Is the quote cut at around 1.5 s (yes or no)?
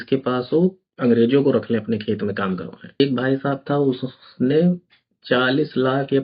no